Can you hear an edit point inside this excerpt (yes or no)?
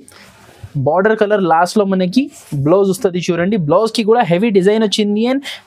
no